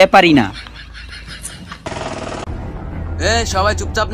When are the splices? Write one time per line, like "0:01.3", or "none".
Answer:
0:01.8